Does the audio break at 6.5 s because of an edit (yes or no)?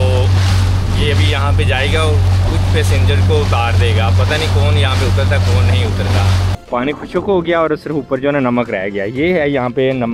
yes